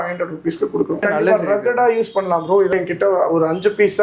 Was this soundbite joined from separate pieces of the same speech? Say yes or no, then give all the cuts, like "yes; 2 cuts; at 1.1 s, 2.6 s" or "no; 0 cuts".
yes; 2 cuts; at 1.0 s, 2.7 s